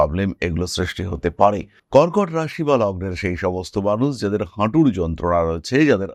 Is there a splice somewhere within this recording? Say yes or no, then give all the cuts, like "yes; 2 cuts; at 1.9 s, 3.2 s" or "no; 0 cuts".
no; 0 cuts